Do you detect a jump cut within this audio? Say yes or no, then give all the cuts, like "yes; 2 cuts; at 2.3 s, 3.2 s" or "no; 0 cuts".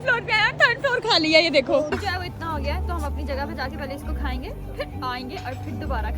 yes; 1 cut; at 1.9 s